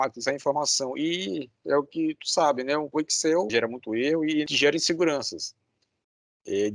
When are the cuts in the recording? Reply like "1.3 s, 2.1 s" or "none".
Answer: 3.5 s, 4.5 s